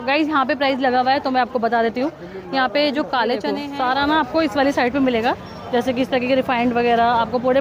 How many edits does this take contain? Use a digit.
1